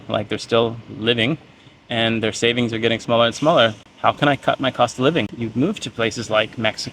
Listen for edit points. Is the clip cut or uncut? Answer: cut